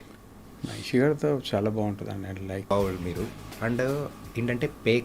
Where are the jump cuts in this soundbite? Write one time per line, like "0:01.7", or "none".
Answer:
0:02.7